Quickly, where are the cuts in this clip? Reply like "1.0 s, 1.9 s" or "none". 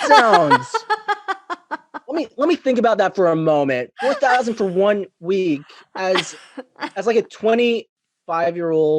7.9 s